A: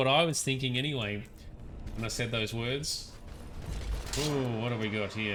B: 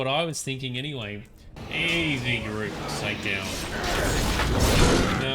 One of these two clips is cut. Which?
B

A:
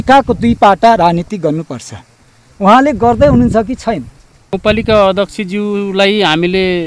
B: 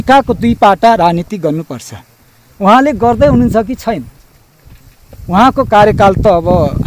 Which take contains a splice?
A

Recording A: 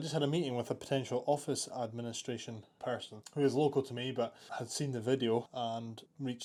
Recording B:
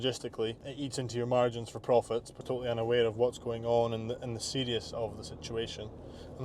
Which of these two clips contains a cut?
B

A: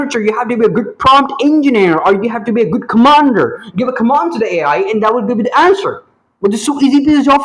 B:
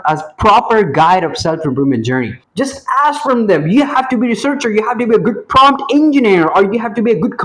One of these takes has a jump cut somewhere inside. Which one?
B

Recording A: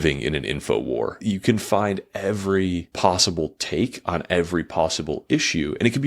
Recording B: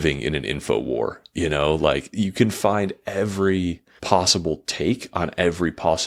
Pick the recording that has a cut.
A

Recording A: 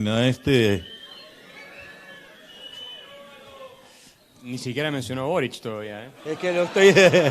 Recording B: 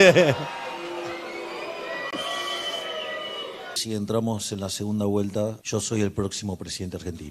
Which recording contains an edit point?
B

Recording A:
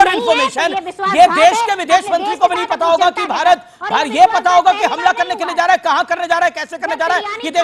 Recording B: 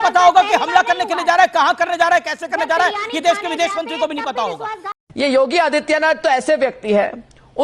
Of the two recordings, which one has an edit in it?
B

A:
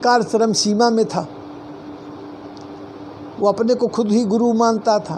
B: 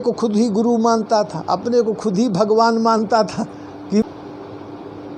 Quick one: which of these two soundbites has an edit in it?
B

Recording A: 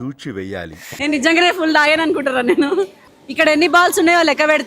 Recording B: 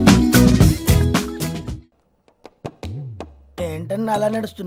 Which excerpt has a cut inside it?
A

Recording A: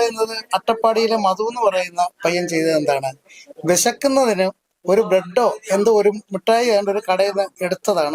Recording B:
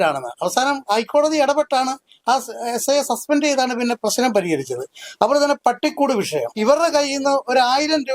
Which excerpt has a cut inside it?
B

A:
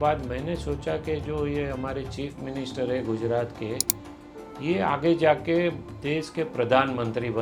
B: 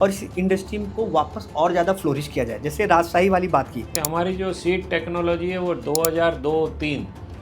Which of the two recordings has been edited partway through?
B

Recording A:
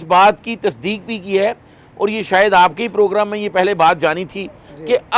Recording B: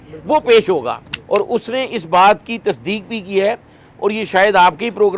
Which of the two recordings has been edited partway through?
B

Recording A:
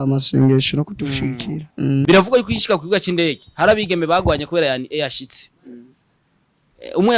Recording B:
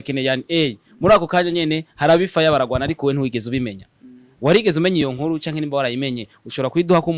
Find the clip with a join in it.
A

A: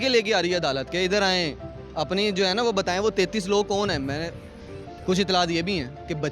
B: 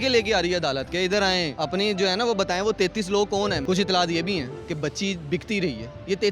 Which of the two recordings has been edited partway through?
B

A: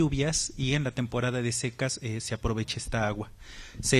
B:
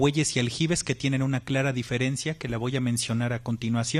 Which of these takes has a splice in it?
A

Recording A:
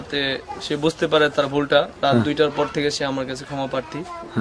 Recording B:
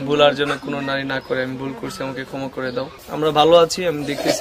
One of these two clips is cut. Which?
B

